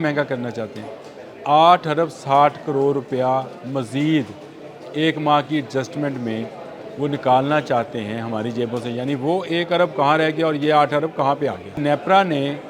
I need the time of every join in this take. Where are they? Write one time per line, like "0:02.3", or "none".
0:11.8